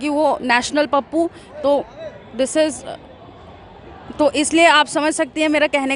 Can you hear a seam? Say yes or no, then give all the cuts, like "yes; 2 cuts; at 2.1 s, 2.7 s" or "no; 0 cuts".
no; 0 cuts